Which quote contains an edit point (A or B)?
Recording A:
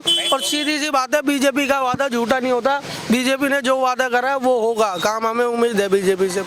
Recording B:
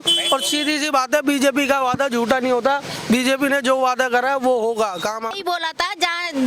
B